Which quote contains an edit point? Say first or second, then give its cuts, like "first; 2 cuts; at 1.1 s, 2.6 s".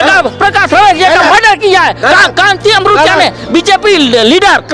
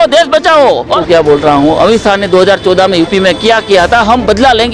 second; 1 cut; at 1.0 s